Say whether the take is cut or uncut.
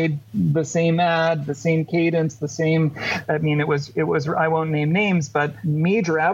uncut